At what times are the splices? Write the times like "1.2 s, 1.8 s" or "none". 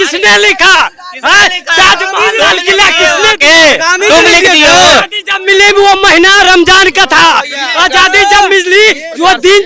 none